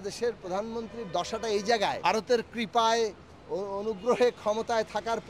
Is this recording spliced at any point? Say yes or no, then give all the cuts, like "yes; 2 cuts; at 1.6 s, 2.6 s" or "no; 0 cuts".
yes; 1 cut; at 2.0 s